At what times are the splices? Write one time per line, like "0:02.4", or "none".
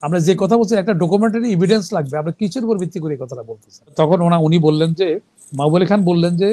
0:03.9